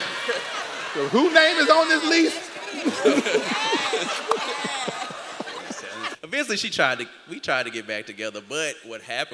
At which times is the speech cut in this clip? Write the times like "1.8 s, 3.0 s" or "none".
6.2 s